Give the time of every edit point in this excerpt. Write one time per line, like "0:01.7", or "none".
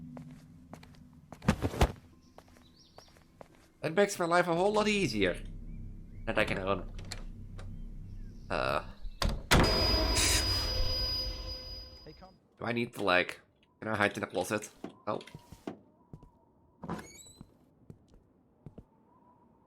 0:12.0